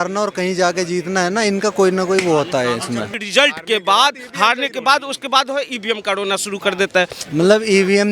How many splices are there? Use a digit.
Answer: 2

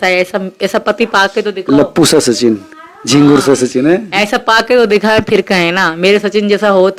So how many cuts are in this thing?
0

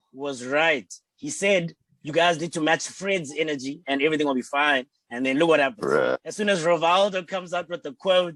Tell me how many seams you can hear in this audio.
0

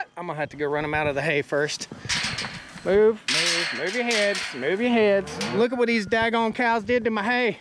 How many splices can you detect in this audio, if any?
1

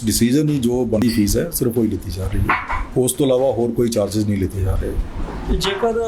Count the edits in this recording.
1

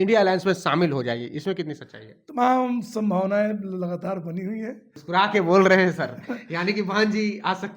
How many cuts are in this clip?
1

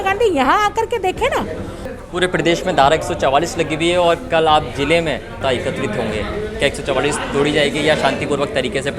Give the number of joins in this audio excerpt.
2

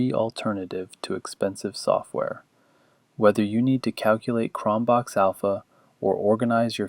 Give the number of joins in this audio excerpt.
0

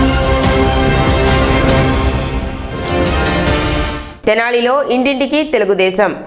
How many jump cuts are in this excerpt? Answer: 1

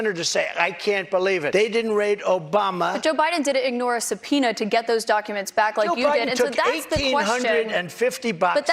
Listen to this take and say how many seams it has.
1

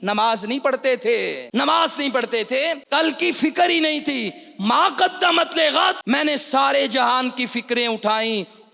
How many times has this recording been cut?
3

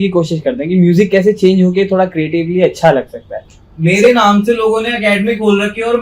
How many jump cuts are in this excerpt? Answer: 1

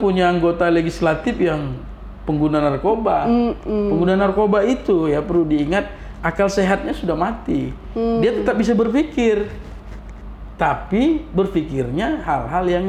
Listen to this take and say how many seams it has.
0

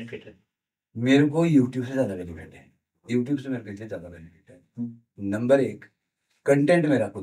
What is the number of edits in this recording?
0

